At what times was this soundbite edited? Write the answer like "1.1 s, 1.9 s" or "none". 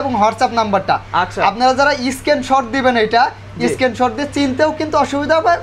none